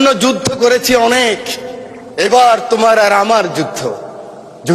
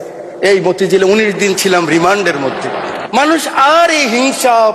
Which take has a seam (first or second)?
second